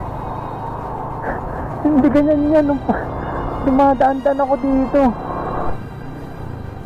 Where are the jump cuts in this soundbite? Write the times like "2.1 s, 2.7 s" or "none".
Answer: 5.7 s